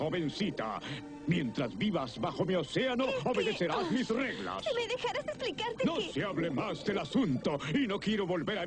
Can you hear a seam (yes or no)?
yes